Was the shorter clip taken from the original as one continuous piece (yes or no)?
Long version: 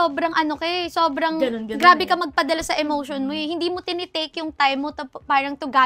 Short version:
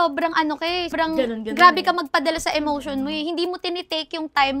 no